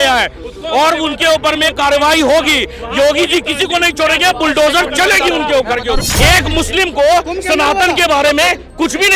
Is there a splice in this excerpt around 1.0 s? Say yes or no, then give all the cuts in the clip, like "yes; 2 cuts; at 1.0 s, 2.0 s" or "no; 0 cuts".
no; 1 cut; at 6.1 s